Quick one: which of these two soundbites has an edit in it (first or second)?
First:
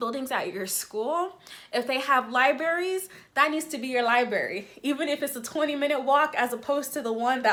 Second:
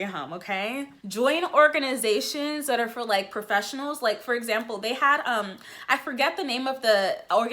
second